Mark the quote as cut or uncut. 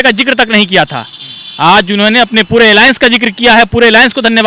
uncut